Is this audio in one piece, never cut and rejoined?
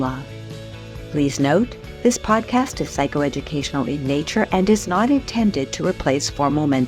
yes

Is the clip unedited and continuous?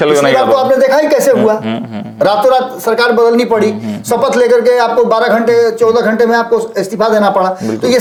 yes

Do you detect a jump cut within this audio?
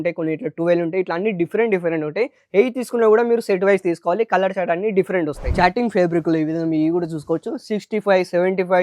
yes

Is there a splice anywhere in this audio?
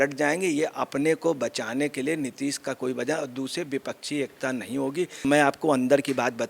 yes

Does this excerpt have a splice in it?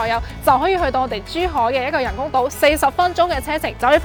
no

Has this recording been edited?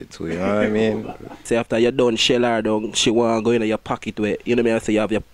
yes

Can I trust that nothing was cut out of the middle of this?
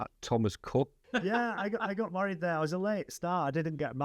no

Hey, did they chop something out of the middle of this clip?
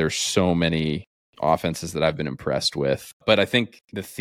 yes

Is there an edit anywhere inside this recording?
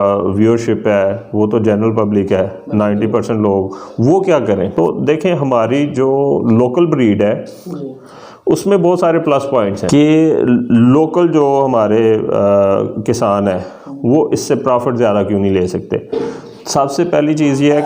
yes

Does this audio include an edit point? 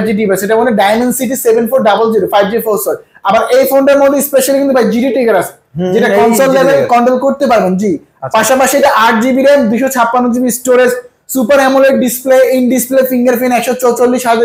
no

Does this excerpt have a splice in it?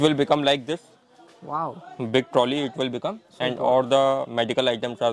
no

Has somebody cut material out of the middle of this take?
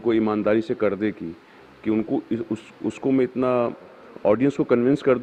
no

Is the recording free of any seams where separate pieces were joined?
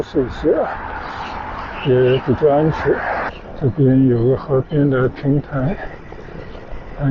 no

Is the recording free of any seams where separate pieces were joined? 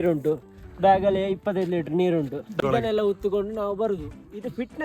no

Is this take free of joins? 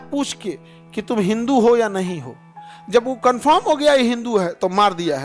yes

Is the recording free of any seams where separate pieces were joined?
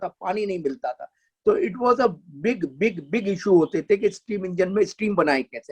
yes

